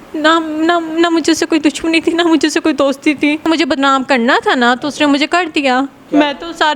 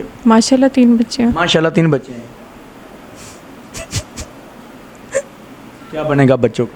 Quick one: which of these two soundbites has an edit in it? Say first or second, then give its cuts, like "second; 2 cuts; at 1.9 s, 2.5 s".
first; 1 cut; at 3.4 s